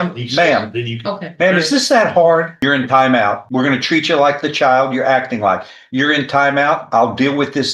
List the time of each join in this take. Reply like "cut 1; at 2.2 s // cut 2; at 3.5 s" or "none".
cut 1; at 2.5 s // cut 2; at 3.4 s